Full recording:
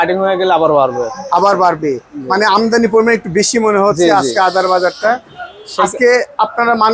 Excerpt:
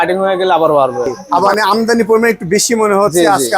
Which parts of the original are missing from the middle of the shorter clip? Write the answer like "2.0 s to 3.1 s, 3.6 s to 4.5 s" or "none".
1.5 s to 2.4 s

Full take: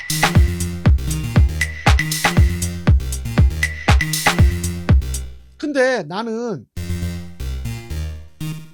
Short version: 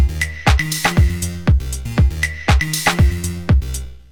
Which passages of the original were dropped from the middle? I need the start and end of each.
none

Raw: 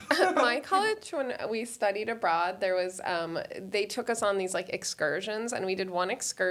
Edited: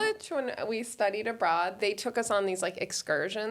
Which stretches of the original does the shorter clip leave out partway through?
2.6 s to 3.7 s

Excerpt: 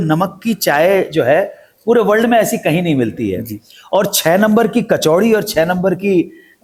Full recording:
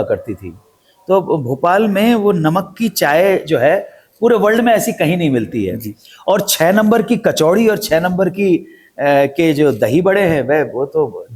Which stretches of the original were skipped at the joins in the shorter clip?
none

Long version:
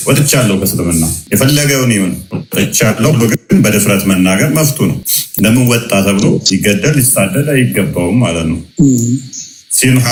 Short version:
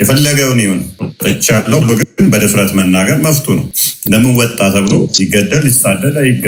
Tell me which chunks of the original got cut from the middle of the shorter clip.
none

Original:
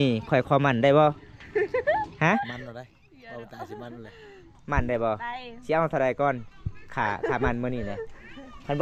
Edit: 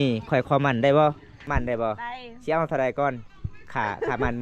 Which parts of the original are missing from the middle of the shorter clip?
1.3 s to 4.5 s

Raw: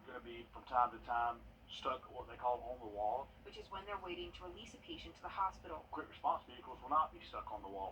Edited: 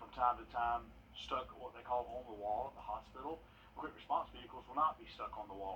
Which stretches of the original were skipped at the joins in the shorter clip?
3.9 s to 5.5 s

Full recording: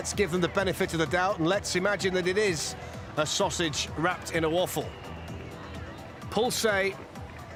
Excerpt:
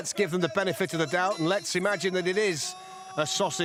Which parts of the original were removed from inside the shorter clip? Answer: none

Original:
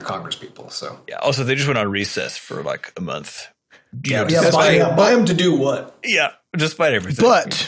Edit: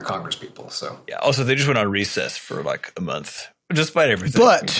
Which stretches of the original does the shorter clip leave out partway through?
3.6 s to 6.4 s

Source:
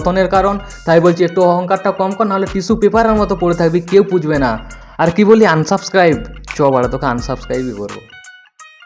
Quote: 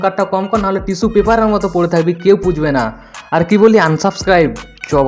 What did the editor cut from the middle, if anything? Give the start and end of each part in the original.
none

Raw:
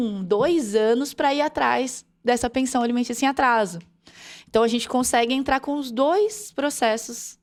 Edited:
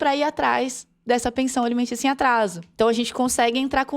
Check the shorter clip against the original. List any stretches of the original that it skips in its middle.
3.8 s to 4.4 s

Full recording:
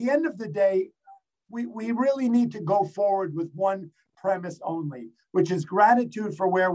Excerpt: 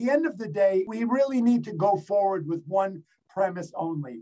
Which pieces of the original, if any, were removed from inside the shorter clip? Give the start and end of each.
0.9 s to 1.8 s

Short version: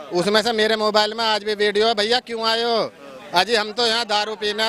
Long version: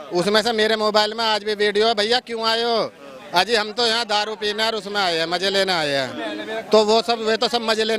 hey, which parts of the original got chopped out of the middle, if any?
none

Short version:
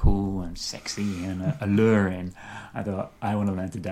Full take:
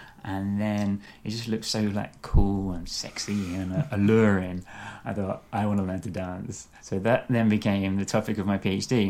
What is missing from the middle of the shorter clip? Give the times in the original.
none

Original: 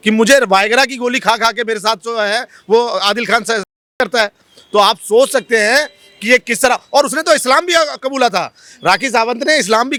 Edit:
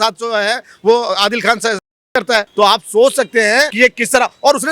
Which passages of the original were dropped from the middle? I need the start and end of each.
4.3 s to 4.6 s, 5.9 s to 6.2 s

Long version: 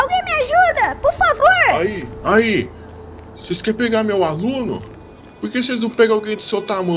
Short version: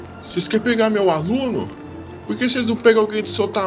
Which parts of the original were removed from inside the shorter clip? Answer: none

